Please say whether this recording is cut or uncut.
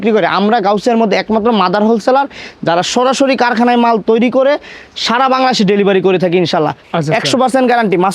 cut